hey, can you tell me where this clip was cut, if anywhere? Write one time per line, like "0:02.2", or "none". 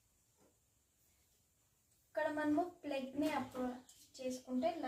none